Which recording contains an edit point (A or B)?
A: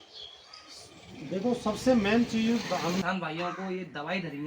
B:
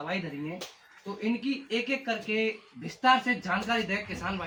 A